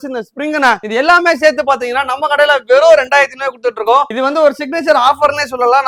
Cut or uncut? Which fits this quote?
uncut